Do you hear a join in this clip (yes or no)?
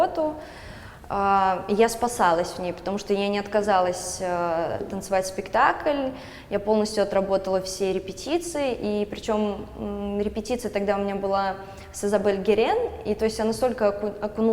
no